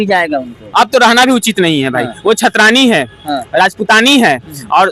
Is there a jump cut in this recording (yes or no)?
no